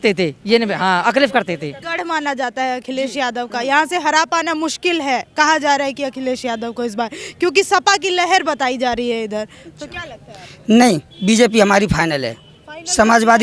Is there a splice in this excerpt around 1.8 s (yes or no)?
yes